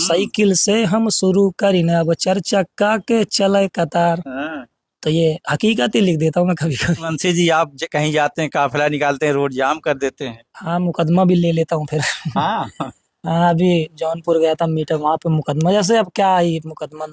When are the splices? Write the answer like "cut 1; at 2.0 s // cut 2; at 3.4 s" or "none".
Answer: cut 1; at 7.1 s